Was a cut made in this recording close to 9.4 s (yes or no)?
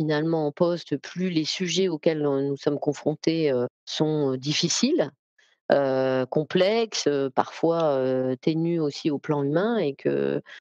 no